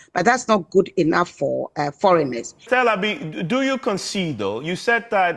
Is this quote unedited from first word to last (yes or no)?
no